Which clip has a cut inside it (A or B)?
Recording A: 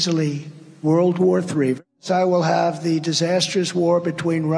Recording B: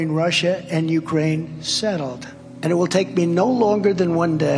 A